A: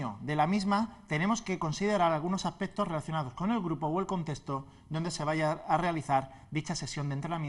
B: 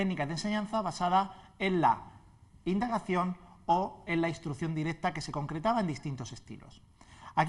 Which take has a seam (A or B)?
B